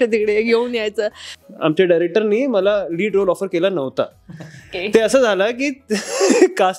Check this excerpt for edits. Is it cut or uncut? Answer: cut